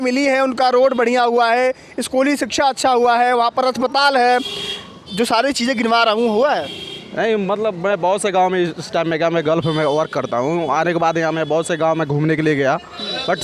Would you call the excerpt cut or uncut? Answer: uncut